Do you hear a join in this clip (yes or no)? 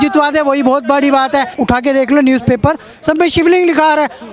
yes